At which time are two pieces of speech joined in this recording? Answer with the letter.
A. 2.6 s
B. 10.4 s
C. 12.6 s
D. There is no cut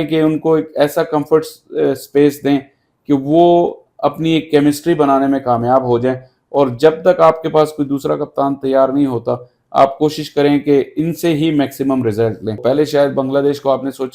C